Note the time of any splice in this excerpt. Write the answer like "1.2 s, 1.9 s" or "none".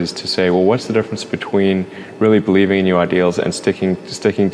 none